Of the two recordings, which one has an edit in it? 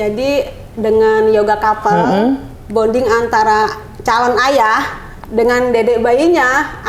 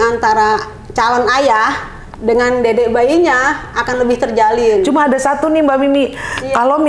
second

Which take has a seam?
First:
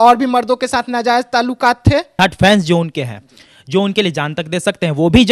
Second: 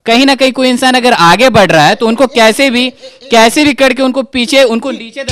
first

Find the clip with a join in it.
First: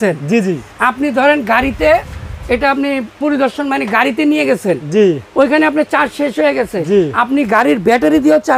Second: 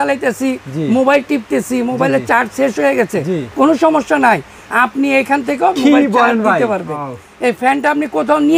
second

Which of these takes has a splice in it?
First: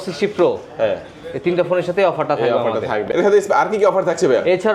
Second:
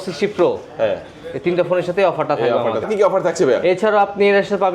second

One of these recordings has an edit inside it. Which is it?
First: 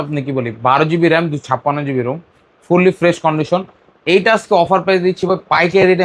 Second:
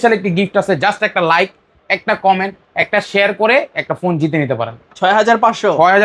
second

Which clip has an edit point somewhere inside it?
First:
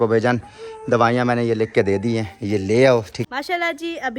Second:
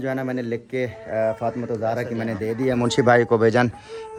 first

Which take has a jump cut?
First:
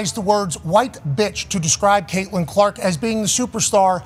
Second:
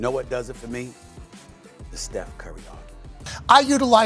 second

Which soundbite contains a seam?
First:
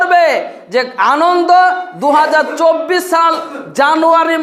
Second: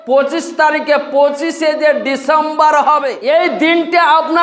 second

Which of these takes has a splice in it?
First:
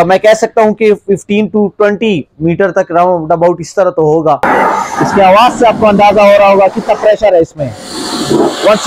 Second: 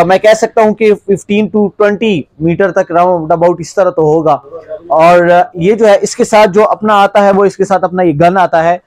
first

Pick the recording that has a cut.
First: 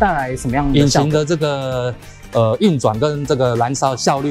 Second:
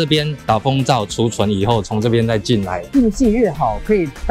second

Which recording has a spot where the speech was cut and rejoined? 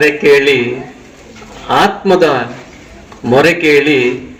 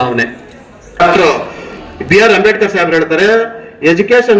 second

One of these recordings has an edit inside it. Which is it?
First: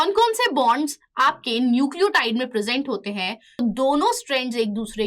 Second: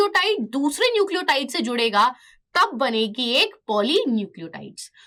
first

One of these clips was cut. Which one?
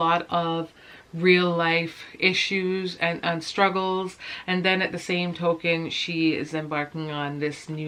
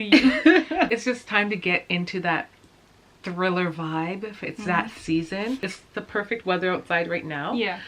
second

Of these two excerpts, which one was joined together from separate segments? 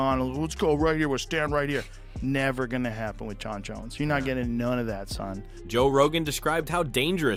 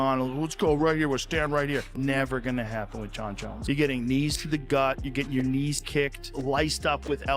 second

